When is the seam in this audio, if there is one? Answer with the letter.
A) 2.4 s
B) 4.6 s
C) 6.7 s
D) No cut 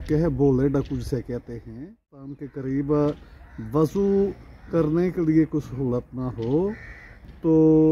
A